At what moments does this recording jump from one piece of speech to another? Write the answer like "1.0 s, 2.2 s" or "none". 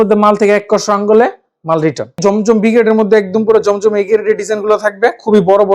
2.1 s